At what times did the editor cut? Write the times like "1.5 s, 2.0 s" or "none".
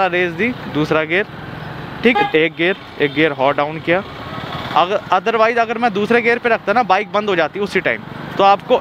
2.1 s